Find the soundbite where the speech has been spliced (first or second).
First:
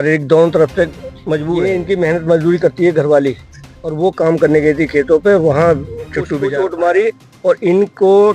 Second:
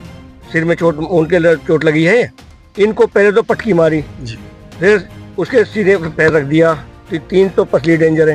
first